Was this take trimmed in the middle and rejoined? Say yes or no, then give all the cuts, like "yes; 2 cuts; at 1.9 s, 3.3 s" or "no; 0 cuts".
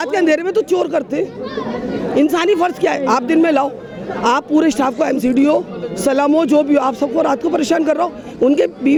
no; 0 cuts